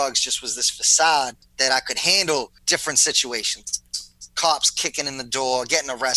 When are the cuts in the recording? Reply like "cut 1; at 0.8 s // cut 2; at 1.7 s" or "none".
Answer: cut 1; at 1.4 s // cut 2; at 2.6 s